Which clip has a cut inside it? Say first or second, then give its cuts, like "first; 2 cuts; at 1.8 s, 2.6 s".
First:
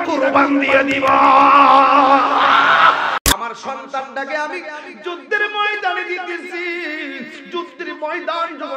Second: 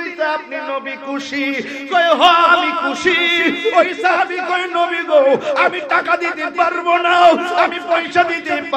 first; 1 cut; at 3.2 s